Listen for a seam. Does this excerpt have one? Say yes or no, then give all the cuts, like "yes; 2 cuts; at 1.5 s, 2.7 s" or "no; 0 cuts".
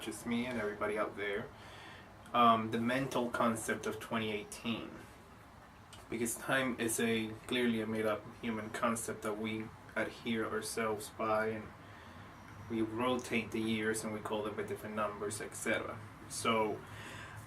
yes; 1 cut; at 1.0 s